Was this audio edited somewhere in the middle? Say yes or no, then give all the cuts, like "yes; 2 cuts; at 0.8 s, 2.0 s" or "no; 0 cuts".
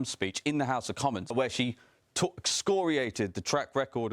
yes; 1 cut; at 1.3 s